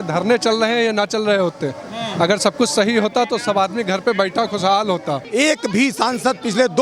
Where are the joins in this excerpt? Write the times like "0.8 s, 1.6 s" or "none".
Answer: 5.2 s